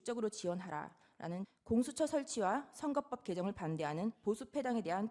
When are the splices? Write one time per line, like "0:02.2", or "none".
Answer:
0:01.5
0:04.2